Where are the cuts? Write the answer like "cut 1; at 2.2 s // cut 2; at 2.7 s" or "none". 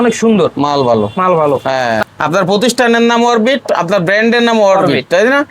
cut 1; at 2.0 s